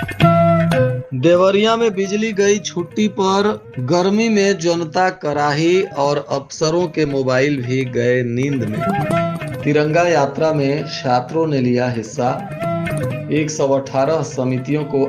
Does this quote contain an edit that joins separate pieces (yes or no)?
yes